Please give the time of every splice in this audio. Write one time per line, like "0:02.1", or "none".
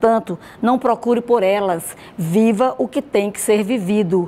none